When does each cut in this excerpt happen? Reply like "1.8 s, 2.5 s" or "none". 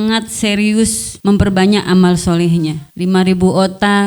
1.1 s, 2.9 s